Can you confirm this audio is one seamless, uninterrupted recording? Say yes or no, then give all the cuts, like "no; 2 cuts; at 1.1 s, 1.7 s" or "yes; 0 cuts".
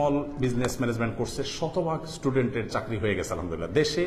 yes; 0 cuts